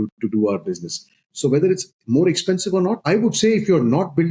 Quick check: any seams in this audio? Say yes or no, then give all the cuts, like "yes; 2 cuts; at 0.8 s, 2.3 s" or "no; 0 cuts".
yes; 2 cuts; at 1.3 s, 3.0 s